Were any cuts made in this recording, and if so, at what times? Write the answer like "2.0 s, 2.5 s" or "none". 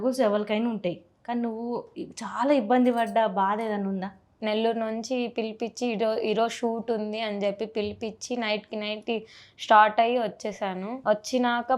4.4 s, 10.9 s